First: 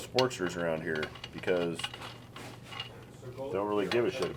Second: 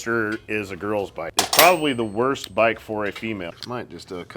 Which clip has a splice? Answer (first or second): second